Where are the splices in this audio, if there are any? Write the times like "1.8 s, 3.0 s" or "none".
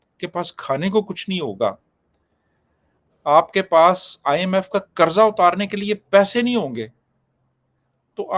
none